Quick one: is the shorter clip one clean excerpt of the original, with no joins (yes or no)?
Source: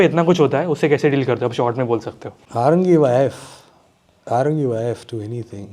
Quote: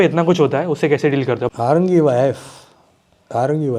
no